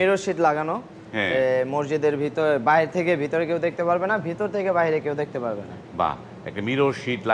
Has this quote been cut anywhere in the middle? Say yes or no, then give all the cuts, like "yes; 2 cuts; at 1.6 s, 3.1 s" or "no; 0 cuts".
no; 0 cuts